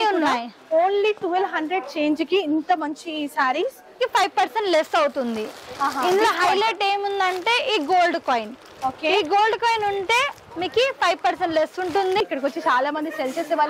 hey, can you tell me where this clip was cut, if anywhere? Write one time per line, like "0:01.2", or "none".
0:04.0
0:12.2

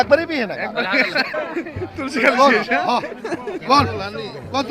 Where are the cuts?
0:01.3

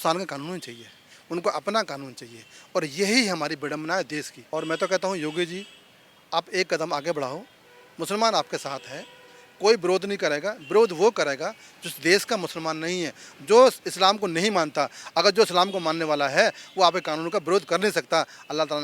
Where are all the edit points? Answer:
0:04.4

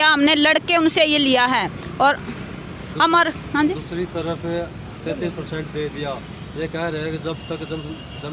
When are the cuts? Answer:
none

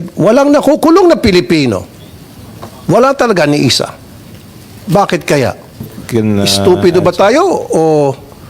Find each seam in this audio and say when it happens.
0:06.0

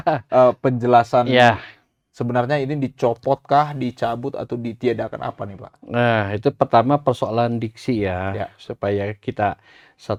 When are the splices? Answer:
none

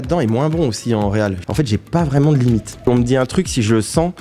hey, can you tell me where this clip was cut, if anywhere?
0:01.4
0:02.9

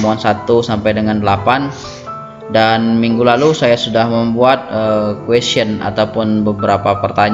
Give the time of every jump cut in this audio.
none

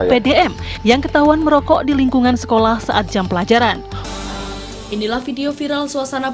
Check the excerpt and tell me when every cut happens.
0:04.0

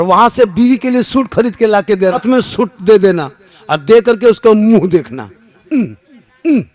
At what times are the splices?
0:02.2

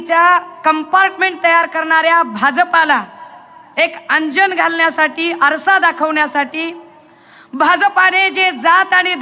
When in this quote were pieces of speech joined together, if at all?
none

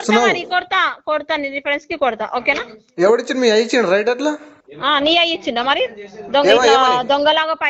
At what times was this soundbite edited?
none

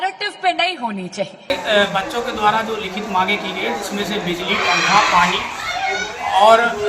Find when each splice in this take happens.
0:01.4

